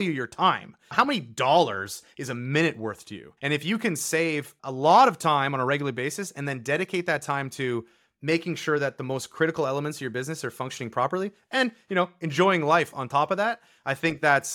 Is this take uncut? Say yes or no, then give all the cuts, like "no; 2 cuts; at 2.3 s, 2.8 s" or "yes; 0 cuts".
no; 1 cut; at 0.9 s